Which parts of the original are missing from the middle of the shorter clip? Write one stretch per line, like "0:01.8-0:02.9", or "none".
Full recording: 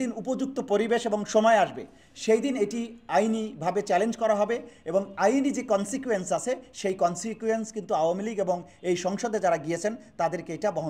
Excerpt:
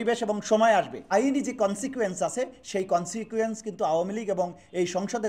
0:01.9-0:05.1